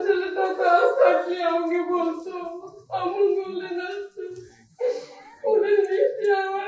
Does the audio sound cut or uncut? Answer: uncut